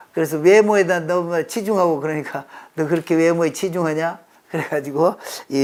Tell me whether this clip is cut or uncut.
uncut